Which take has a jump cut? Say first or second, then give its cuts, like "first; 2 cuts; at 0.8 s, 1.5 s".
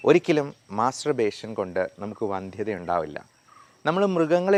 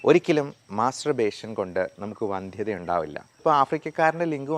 second; 1 cut; at 3.3 s